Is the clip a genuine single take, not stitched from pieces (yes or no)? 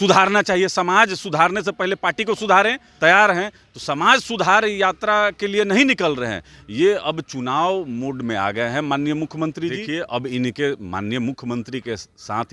no